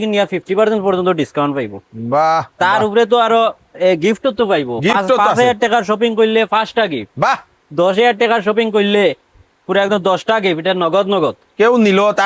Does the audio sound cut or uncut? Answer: uncut